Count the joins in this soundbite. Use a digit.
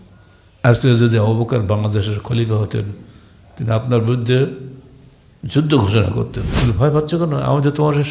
1